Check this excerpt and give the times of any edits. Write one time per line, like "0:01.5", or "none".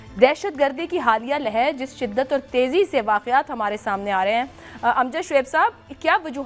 none